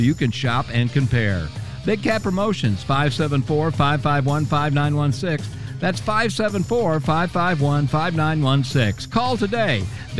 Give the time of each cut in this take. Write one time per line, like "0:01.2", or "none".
none

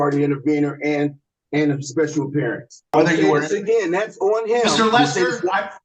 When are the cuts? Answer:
0:02.9

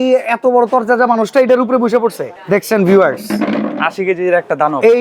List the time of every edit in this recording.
0:02.3

